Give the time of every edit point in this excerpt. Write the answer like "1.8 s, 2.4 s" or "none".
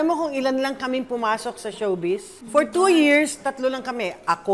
2.3 s